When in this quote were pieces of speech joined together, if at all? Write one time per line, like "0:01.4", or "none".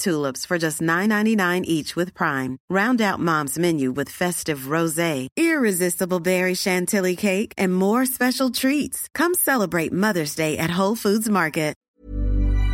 0:11.8